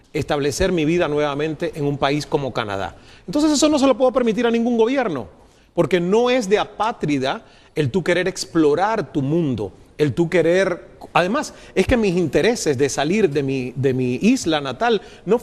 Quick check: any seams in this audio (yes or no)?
yes